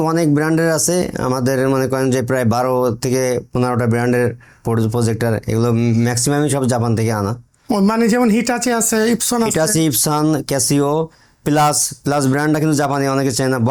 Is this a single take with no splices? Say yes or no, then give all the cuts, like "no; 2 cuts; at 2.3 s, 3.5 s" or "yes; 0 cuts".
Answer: yes; 0 cuts